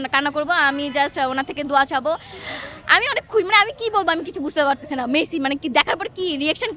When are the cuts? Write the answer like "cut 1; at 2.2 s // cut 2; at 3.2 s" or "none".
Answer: none